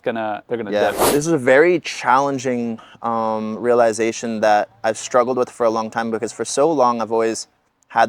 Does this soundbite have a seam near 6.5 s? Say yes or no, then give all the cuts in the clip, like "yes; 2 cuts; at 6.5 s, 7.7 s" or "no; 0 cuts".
no; 1 cut; at 1.1 s